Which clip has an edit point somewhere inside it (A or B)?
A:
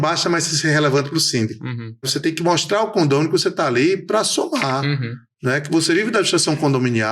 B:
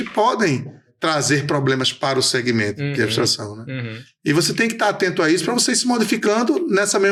A